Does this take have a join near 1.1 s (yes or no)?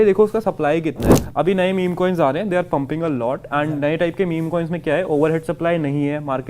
yes